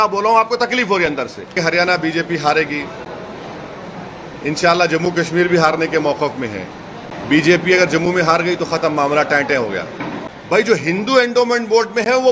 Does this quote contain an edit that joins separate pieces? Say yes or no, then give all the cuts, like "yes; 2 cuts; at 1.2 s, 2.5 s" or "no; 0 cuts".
yes; 3 cuts; at 1.6 s, 7.1 s, 10.2 s